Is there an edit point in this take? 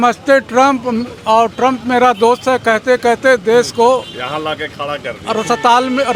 no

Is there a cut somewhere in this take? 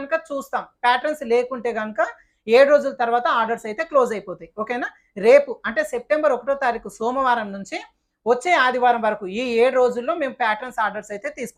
no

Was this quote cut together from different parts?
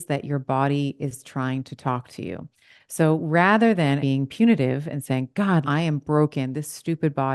yes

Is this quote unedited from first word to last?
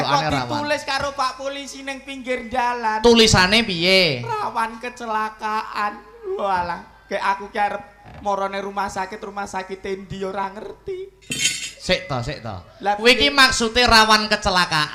yes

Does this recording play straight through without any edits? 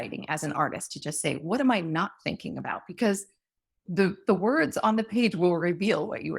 yes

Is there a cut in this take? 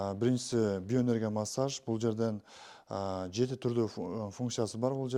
no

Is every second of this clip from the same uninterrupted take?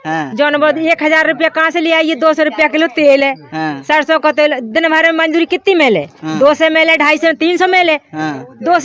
yes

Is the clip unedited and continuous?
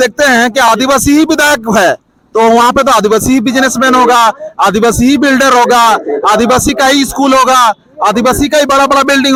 yes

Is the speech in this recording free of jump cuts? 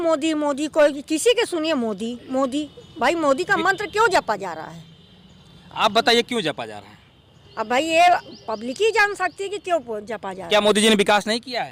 yes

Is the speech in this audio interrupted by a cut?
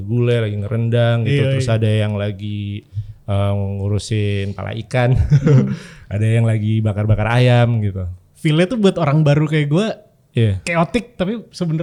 no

